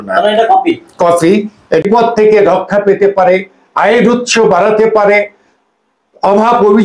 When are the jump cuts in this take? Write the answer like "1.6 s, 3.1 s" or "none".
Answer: 1.8 s